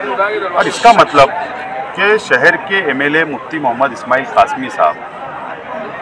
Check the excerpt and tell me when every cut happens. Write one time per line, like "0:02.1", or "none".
none